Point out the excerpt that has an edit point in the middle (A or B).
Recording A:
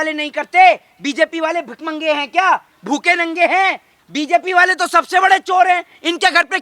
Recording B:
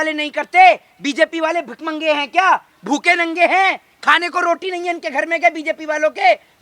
A